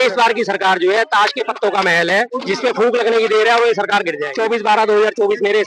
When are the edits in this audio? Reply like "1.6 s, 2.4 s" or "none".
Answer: 2.4 s, 4.2 s